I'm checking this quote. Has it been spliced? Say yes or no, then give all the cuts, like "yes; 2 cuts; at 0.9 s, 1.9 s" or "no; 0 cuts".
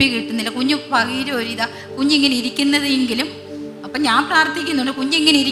no; 0 cuts